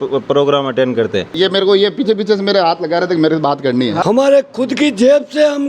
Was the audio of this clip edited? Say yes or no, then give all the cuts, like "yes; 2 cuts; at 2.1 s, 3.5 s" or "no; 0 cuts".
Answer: yes; 2 cuts; at 1.3 s, 4.0 s